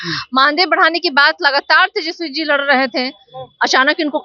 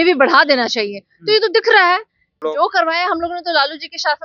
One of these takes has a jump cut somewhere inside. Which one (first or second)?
second